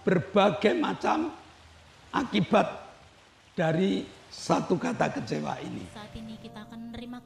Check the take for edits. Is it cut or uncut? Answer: cut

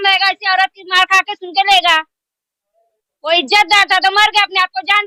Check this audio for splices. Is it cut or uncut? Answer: uncut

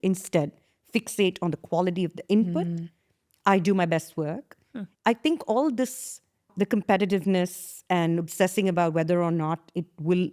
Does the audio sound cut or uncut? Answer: cut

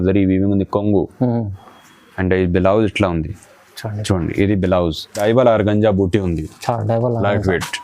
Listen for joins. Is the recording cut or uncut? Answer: cut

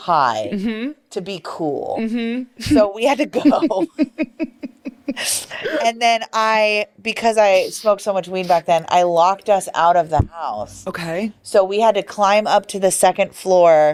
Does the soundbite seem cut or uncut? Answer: uncut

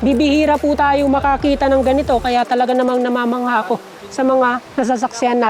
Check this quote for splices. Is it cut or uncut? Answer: uncut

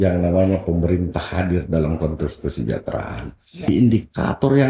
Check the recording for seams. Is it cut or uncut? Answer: cut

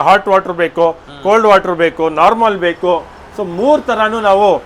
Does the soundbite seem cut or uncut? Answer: uncut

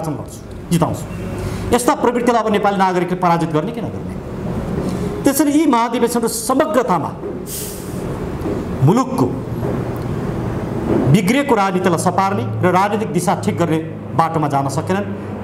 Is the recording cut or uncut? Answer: uncut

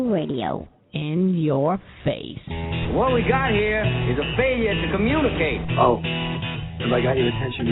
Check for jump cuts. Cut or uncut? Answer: uncut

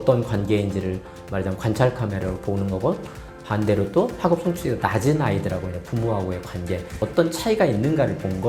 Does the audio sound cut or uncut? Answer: cut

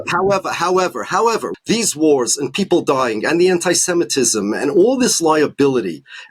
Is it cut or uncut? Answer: cut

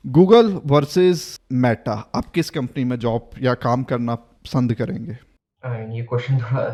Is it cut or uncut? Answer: uncut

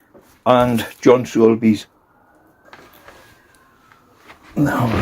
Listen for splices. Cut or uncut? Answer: cut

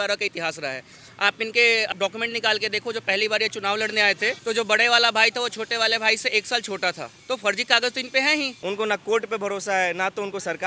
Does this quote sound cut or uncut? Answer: cut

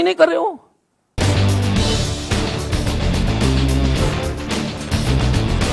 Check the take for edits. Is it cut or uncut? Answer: cut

